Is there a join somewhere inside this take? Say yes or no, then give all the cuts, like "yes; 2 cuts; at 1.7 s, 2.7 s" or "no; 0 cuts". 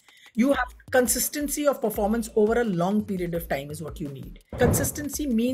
yes; 1 cut; at 4.5 s